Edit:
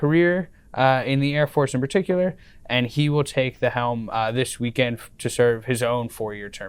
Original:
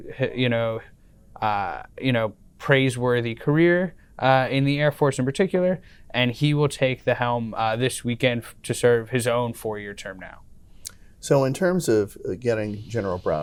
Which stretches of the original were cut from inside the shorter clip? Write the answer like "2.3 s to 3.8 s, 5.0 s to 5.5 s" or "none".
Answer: none